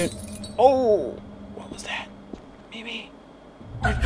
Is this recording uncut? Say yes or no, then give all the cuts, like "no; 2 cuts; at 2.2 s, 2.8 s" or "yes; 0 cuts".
no; 1 cut; at 2.6 s